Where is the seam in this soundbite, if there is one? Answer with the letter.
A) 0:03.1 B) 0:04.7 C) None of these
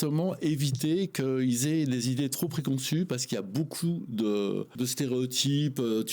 B